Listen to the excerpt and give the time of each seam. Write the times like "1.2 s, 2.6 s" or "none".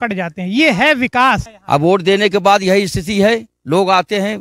1.5 s

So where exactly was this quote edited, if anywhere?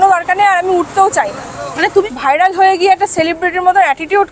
2.0 s

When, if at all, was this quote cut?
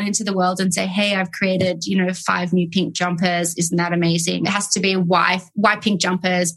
4.4 s

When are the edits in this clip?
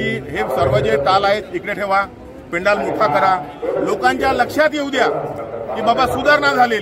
none

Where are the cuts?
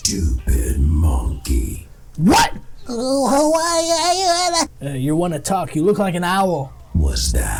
none

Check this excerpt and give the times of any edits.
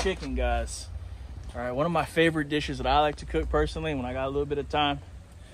none

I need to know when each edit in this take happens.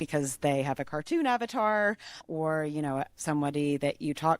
2.2 s, 3.1 s

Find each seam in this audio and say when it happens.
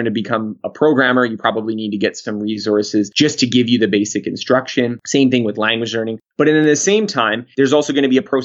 3.1 s, 5.0 s, 7.4 s

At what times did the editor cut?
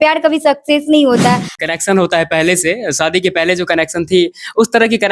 1.5 s

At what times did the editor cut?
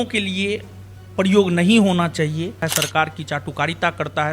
2.7 s

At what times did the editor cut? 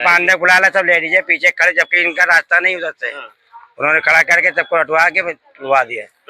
none

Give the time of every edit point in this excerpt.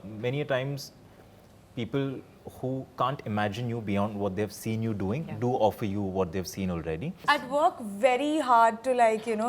7.2 s

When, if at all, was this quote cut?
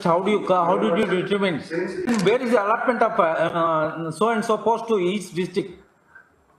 2.1 s

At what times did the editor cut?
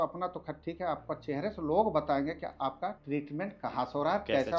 3.0 s

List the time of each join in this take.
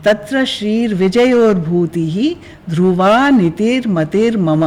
none

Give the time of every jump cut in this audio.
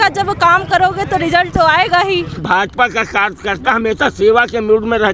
2.4 s

